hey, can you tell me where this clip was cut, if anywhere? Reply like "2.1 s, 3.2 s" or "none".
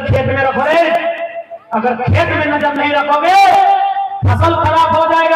none